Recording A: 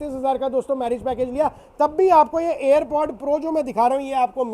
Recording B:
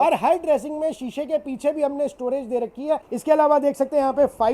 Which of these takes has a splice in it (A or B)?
B